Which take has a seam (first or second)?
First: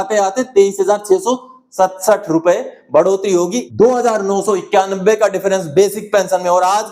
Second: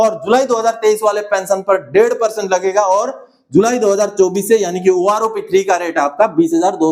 first